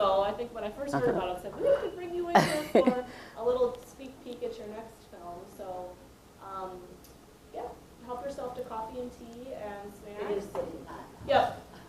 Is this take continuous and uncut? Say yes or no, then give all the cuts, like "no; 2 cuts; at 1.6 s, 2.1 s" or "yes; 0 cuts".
no; 1 cut; at 5.2 s